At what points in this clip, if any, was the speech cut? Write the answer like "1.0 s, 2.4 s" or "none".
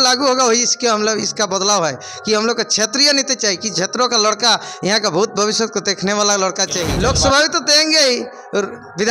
6.9 s